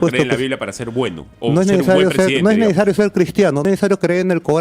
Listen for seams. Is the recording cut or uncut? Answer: cut